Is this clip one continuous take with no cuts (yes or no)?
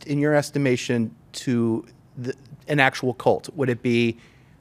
yes